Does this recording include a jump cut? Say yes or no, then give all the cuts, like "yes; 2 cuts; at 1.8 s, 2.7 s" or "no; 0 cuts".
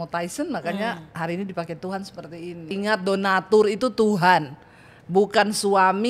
yes; 1 cut; at 2.7 s